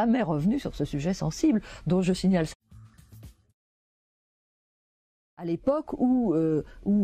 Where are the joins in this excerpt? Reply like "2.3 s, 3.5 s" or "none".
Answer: none